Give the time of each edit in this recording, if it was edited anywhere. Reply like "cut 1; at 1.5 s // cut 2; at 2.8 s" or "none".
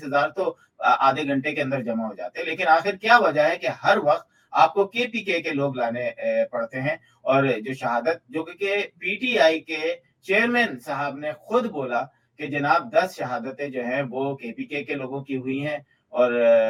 none